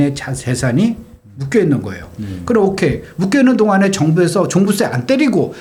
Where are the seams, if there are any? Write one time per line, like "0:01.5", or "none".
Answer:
none